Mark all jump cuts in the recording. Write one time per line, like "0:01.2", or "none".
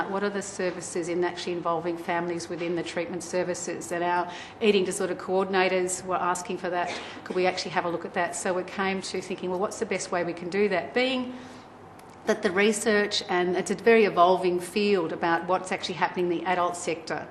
0:04.0